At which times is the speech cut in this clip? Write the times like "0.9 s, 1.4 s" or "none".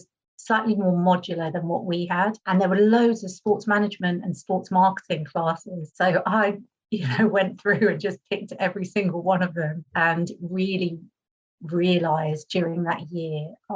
none